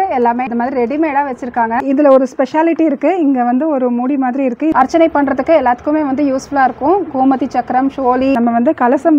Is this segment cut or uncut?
cut